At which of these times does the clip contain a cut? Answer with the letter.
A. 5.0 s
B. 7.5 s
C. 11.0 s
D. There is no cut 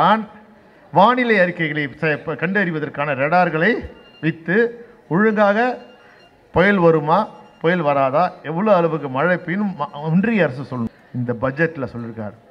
C